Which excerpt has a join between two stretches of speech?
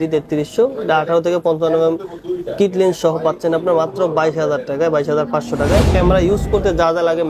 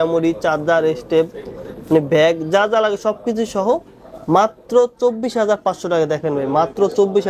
first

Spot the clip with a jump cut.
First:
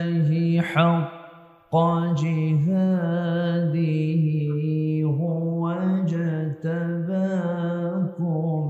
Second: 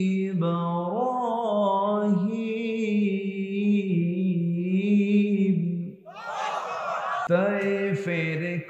second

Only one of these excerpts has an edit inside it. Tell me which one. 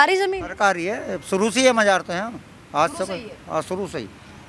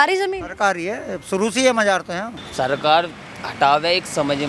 second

